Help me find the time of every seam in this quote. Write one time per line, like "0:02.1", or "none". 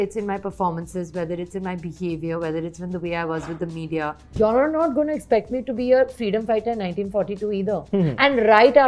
0:04.2